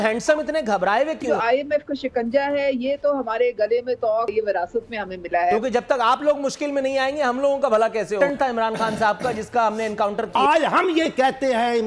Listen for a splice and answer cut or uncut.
cut